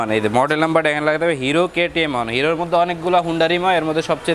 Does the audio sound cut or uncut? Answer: uncut